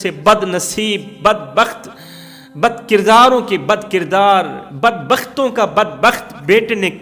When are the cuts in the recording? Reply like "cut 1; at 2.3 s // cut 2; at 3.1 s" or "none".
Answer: none